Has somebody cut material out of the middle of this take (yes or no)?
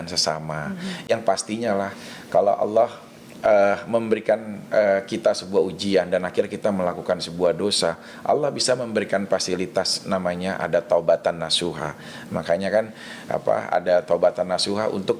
no